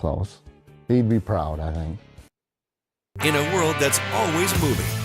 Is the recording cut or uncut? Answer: cut